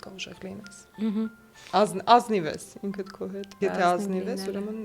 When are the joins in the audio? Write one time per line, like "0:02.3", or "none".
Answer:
0:03.5